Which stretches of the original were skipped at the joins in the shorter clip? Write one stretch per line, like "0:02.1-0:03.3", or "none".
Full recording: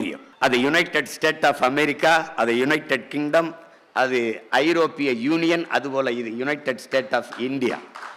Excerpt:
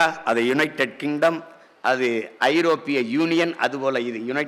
none